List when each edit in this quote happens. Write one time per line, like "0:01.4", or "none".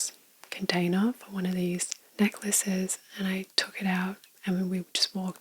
0:04.2